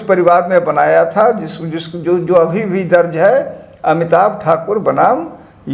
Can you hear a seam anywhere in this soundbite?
no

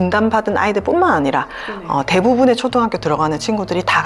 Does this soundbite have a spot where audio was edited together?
no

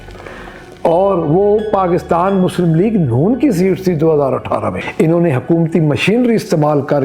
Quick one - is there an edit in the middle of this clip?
yes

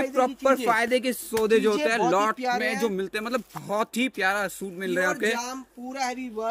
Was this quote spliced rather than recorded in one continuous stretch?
no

